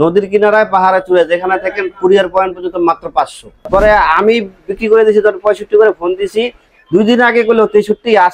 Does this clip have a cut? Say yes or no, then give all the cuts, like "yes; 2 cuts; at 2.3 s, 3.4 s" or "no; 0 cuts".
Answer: yes; 1 cut; at 3.8 s